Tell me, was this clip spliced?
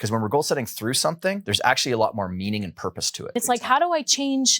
yes; 2 cuts; at 1.5 s, 3.4 s

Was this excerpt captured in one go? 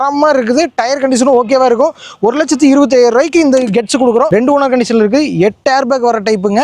no; 1 cut; at 4.3 s

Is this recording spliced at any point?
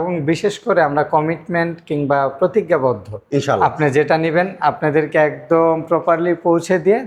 no; 0 cuts

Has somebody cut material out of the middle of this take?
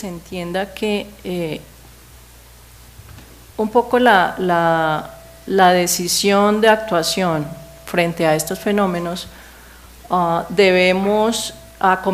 no; 0 cuts

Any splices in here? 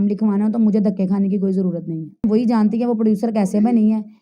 yes; 1 cut; at 2.2 s

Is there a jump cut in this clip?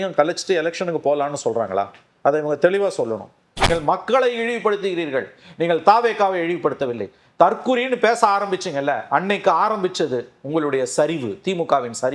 yes; 1 cut; at 3.6 s

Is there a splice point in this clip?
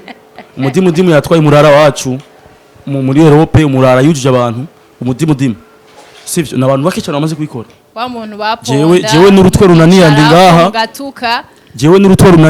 no; 0 cuts

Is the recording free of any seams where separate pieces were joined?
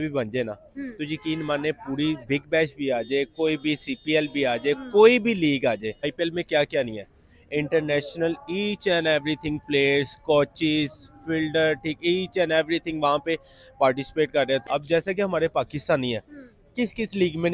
no; 2 cuts; at 6.0 s, 14.6 s

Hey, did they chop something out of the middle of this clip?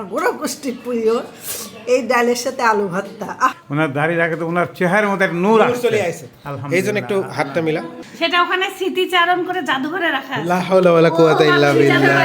yes; 2 cuts; at 3.6 s, 8.0 s

